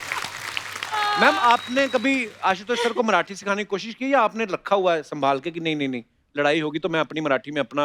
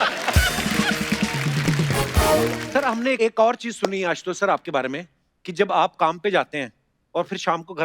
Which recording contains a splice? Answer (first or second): second